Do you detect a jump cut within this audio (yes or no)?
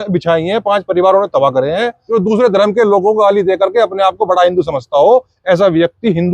yes